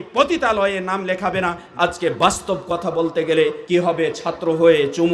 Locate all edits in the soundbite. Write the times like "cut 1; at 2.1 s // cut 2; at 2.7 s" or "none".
cut 1; at 1.6 s // cut 2; at 3.6 s

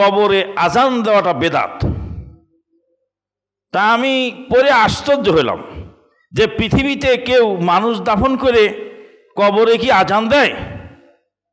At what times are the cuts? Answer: none

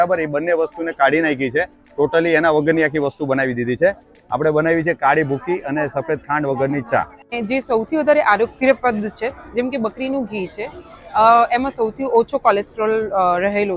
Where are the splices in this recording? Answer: cut 1; at 7.3 s

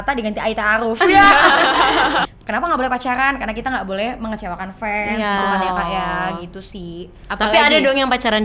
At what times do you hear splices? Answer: cut 1; at 2.2 s

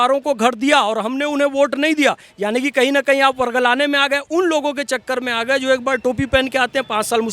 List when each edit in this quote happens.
none

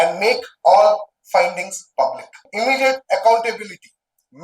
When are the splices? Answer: cut 1; at 2.4 s

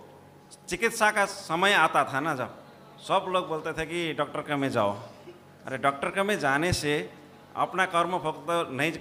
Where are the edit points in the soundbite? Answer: none

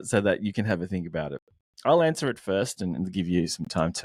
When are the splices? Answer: none

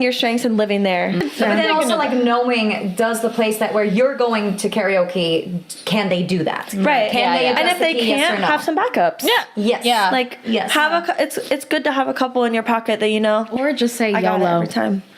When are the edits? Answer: cut 1; at 1.2 s

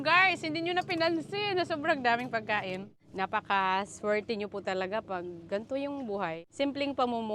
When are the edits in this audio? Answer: cut 1; at 3.0 s // cut 2; at 6.4 s

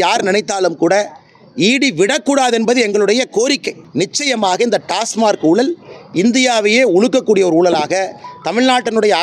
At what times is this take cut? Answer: cut 1; at 3.8 s

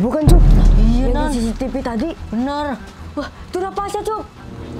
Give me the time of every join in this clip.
none

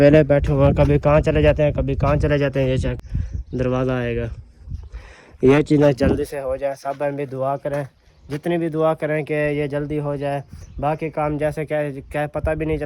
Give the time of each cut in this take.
cut 1; at 3.0 s

